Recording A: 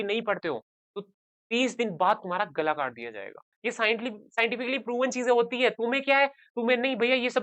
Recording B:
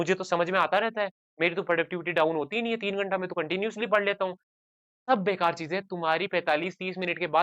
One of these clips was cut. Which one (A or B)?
A